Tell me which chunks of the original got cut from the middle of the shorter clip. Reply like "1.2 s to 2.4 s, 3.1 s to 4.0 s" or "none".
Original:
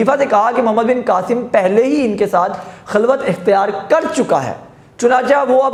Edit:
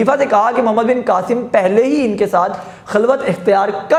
none